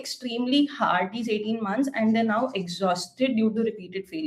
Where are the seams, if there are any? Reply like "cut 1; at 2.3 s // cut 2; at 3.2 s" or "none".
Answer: none